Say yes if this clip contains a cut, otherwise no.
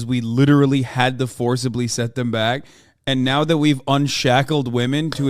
no